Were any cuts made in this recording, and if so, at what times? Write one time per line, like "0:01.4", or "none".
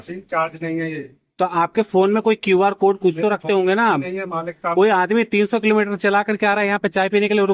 none